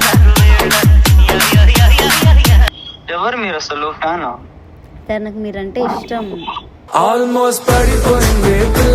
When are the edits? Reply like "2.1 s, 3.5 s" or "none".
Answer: 2.7 s